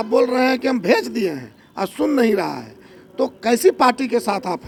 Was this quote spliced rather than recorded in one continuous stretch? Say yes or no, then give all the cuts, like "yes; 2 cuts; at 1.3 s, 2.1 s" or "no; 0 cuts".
no; 0 cuts